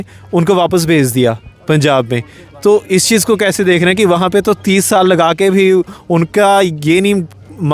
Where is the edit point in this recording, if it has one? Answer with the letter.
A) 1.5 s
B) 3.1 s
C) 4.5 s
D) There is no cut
D